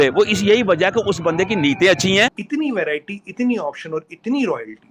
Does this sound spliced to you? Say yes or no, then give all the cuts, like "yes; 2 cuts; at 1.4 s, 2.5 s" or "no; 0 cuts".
yes; 1 cut; at 2.4 s